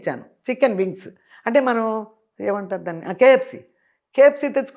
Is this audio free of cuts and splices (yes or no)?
yes